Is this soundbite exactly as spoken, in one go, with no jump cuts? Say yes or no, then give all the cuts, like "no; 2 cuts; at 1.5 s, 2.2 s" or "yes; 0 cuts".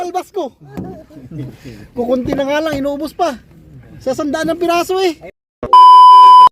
no; 1 cut; at 5.5 s